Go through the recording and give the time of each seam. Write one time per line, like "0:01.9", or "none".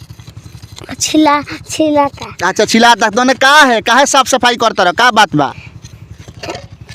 none